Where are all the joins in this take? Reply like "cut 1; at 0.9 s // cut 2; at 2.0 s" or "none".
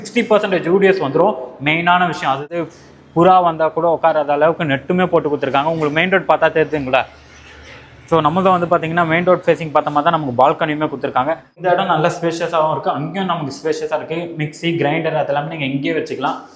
cut 1; at 2.4 s // cut 2; at 11.5 s